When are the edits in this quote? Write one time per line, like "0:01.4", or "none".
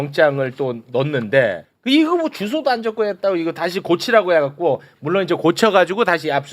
0:01.7